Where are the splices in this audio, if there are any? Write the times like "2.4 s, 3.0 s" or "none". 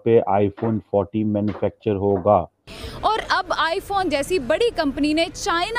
2.8 s

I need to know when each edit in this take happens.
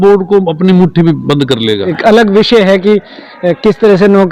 1.9 s

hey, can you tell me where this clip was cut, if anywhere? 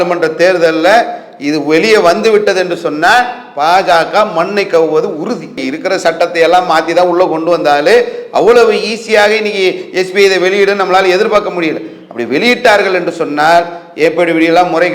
none

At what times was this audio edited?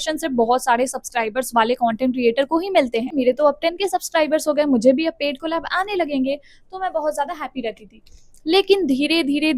3.1 s

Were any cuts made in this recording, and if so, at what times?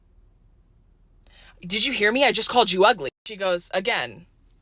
3.1 s

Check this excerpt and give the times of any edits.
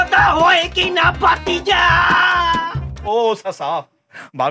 2.9 s

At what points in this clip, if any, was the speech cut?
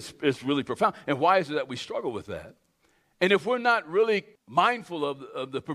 4.4 s

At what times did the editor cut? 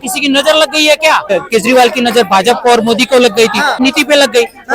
1.3 s, 3.8 s

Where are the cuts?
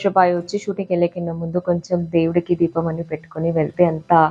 none

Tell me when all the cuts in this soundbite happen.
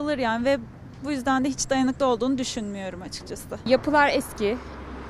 3.7 s

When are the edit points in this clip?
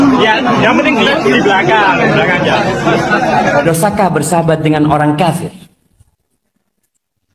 3.6 s

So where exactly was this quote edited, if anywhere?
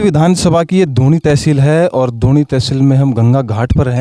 none

